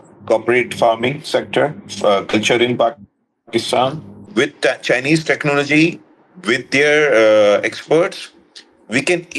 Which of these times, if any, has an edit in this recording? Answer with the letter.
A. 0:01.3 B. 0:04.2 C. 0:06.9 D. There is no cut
B